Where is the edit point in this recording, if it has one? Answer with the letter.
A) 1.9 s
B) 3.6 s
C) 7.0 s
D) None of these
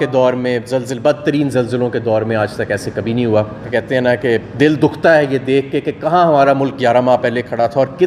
B